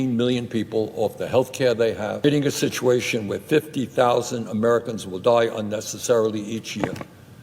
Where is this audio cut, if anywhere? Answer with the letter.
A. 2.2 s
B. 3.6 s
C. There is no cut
A